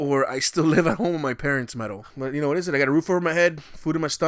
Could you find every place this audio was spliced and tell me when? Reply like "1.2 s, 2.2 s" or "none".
2.0 s